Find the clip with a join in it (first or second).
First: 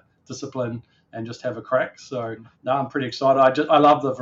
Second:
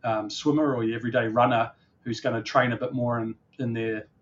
first